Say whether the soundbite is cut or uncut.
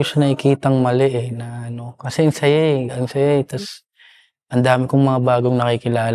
uncut